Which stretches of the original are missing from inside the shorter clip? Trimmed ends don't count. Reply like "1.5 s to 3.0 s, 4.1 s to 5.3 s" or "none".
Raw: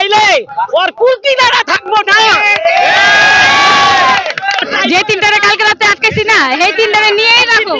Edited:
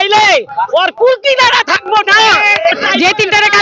2.7 s to 4.6 s